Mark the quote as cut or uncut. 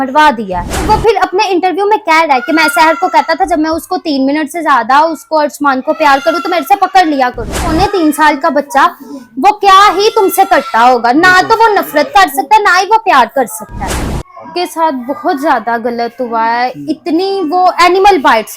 cut